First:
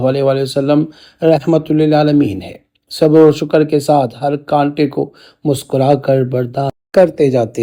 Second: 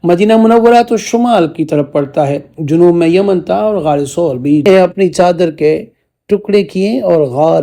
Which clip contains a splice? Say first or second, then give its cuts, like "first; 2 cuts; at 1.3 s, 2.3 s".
second; 1 cut; at 4.7 s